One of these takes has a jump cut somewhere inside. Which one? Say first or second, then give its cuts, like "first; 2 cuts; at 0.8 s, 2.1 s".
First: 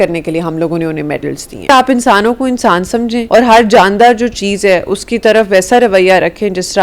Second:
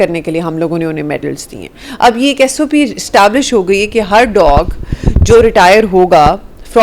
first; 2 cuts; at 1.7 s, 3.2 s